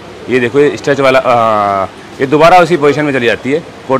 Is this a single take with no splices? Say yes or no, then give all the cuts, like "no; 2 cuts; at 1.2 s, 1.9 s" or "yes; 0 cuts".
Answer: yes; 0 cuts